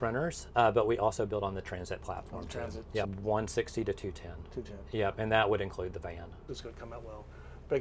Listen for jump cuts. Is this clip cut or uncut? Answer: cut